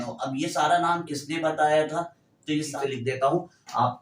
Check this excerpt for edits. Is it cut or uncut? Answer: cut